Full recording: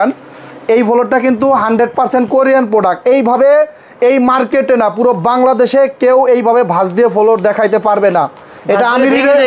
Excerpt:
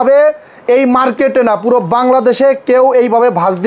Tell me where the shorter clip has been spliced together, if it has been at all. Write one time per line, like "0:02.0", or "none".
none